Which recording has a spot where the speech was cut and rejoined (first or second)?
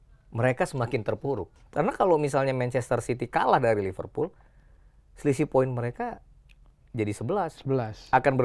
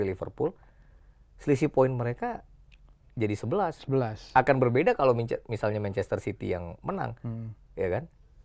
first